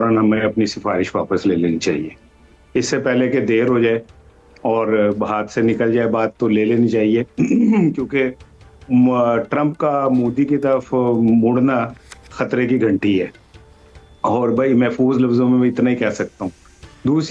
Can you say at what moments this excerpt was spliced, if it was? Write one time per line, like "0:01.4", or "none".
none